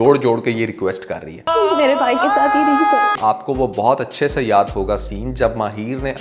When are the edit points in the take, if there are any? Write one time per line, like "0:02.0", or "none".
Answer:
0:03.2